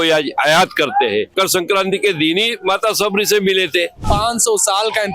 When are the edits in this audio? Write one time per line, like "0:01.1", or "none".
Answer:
0:01.3
0:04.0

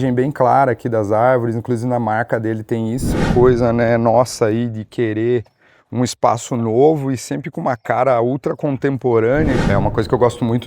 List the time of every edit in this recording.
0:03.3
0:09.6

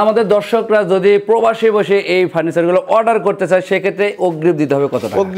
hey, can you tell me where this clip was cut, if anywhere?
none

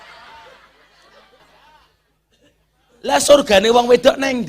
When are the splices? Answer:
0:01.4

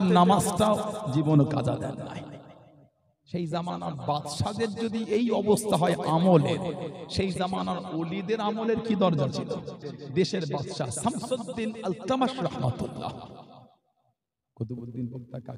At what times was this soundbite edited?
0:09.9

